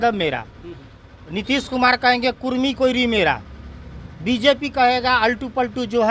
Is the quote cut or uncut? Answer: uncut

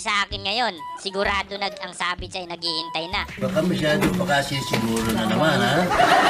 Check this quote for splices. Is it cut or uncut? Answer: uncut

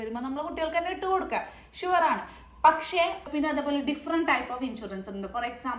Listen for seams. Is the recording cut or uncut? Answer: cut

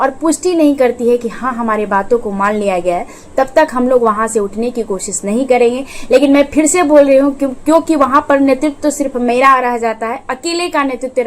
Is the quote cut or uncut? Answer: uncut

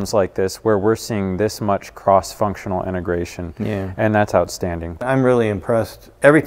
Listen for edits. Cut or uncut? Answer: cut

